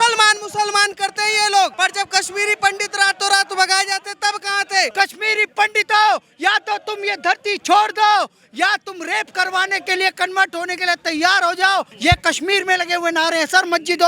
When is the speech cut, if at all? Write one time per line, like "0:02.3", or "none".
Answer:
0:01.7
0:04.9
0:11.9